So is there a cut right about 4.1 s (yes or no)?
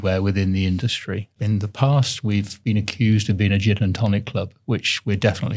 no